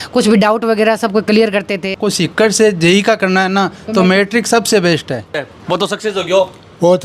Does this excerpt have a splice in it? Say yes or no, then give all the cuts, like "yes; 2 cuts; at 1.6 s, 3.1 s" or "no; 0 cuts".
yes; 2 cuts; at 2.0 s, 5.5 s